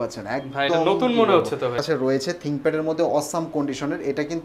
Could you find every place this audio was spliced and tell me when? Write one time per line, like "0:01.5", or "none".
0:01.8